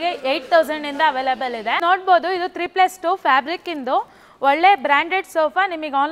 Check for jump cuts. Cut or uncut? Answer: cut